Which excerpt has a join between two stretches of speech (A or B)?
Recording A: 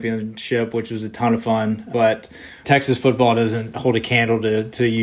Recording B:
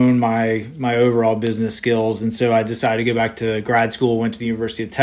A